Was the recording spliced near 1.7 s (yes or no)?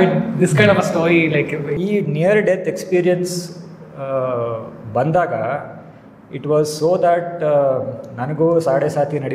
yes